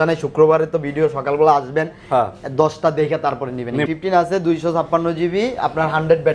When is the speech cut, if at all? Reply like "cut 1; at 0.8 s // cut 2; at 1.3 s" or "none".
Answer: cut 1; at 3.9 s